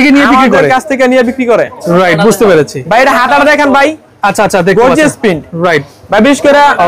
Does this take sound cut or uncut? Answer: uncut